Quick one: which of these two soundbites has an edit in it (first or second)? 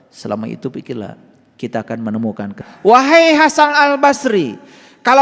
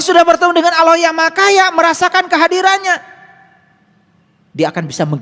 first